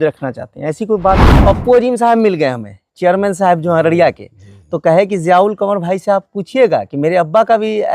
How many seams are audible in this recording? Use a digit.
1